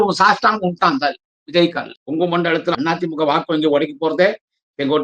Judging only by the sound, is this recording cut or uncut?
cut